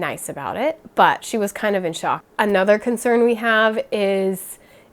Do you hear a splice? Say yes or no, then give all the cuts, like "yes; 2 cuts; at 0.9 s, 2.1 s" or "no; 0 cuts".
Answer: yes; 1 cut; at 2.3 s